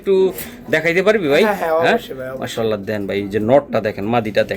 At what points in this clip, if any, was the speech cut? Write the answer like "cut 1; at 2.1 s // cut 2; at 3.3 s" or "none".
none